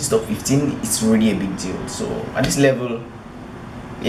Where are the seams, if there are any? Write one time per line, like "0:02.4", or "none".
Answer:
none